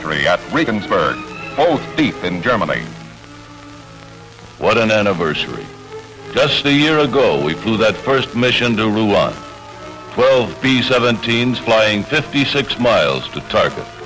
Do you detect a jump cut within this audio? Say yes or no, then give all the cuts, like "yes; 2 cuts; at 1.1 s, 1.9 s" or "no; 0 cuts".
no; 0 cuts